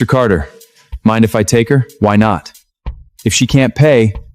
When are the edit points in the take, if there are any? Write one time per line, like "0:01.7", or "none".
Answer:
none